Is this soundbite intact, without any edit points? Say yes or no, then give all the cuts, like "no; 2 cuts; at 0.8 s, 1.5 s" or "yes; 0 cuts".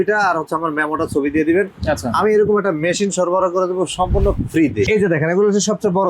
no; 1 cut; at 4.9 s